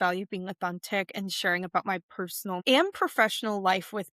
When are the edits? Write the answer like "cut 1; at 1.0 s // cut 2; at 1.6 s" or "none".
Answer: cut 1; at 2.6 s